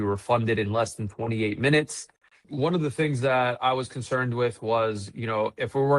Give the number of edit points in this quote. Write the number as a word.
one